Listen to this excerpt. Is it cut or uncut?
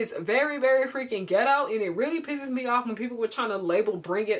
uncut